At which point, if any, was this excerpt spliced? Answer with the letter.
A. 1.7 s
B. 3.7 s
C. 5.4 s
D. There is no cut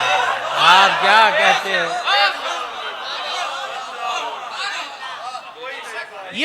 D